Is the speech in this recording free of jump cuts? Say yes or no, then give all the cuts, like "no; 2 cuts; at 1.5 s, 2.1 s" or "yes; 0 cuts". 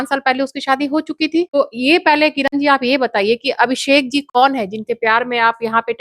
no; 1 cut; at 1.5 s